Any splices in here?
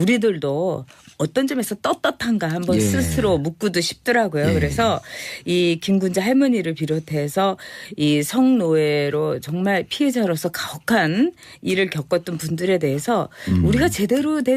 yes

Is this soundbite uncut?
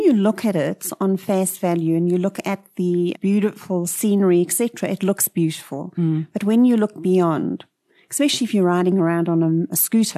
yes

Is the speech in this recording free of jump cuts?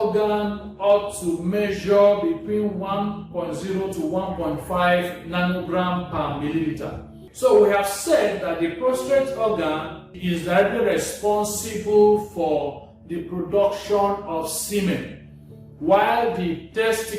no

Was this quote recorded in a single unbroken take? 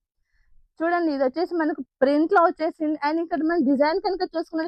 yes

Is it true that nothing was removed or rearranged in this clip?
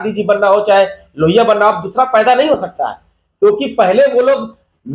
yes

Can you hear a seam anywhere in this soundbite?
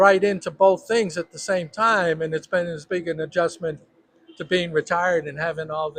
no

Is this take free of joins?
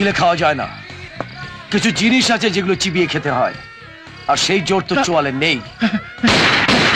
yes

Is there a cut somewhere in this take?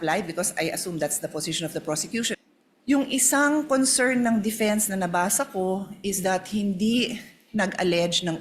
yes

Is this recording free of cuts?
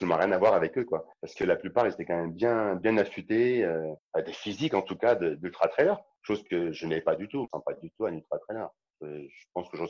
no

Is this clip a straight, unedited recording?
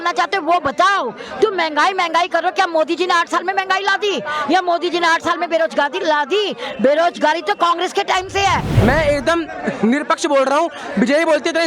no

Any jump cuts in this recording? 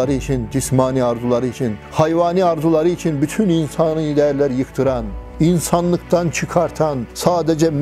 no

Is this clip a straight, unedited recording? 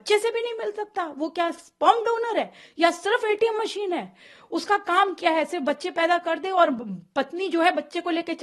yes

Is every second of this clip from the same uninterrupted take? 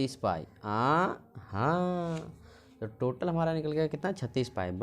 yes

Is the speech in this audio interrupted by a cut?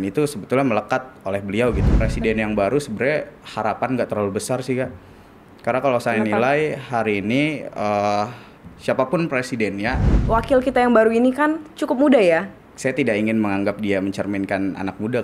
yes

